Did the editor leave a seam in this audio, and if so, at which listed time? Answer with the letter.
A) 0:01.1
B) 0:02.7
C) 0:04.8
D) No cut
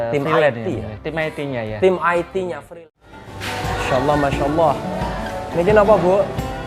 B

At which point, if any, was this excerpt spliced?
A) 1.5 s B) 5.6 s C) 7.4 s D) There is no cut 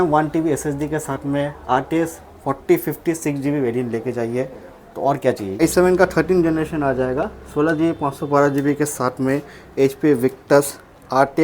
B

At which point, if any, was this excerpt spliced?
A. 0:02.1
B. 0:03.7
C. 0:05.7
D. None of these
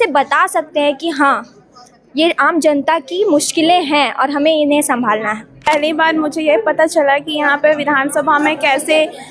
C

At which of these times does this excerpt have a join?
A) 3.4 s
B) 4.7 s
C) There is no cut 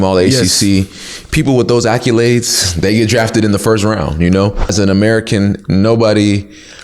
B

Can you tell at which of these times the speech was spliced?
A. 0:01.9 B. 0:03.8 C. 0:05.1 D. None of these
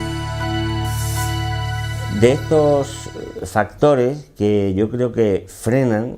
A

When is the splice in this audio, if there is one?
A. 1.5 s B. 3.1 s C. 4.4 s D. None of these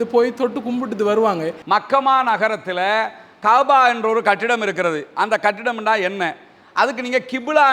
A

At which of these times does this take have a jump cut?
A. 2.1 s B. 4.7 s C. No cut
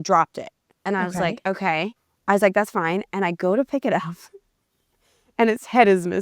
A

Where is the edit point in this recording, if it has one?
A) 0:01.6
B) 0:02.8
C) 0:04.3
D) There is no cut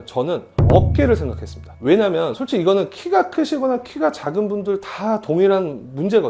D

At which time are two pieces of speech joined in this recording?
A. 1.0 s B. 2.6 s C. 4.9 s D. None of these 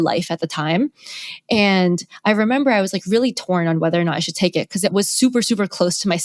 C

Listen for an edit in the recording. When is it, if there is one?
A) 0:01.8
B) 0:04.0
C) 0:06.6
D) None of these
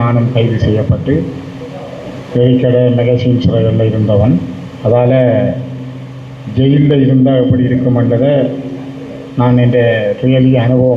D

